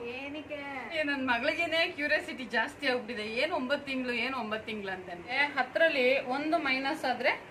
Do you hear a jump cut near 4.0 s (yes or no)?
no